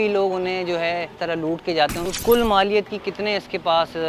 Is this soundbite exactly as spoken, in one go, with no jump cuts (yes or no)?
no